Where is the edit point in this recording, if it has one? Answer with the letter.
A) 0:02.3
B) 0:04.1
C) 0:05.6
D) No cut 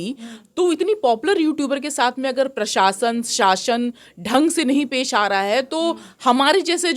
D